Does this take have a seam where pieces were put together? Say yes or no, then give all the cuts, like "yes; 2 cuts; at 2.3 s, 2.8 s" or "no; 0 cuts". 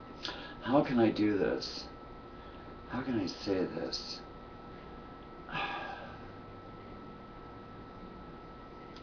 no; 0 cuts